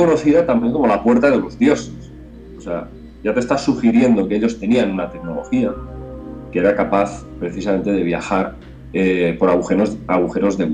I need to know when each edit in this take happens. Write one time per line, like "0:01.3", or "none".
none